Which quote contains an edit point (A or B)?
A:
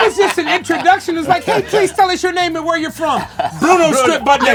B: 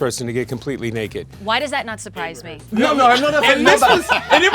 B